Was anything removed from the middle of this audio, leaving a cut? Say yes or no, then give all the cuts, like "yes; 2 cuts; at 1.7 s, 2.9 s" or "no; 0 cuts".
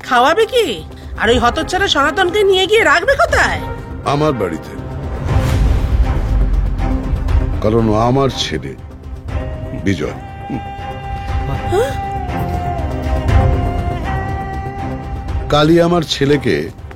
no; 0 cuts